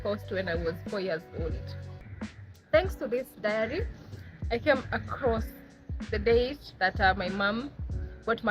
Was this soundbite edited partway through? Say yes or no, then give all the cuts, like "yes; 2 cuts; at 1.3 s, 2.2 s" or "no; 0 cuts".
yes; 1 cut; at 2.0 s